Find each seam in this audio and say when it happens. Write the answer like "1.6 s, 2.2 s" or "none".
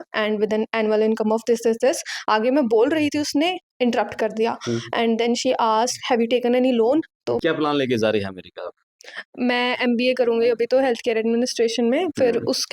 7.4 s

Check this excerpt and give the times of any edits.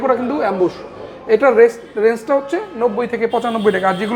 none

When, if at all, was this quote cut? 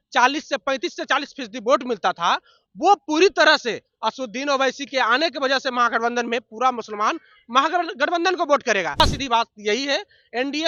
9.0 s

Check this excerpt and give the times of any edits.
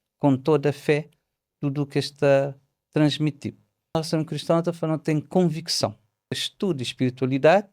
4.0 s, 6.4 s

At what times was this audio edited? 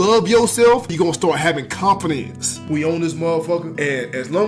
0.9 s, 2.5 s, 3.7 s

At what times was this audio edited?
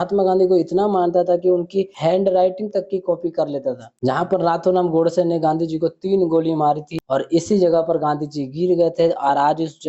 3.8 s

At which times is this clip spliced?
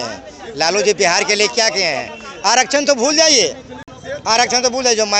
none

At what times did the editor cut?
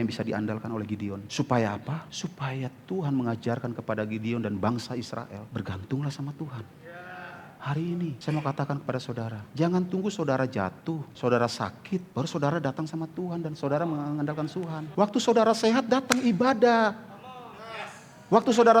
1.2 s, 2.1 s, 5.4 s, 7.5 s, 8.2 s, 9.4 s, 11.1 s, 12.1 s, 14.8 s

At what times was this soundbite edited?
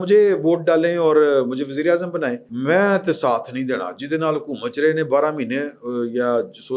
2.5 s

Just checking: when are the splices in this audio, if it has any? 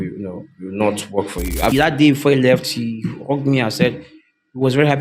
1.7 s

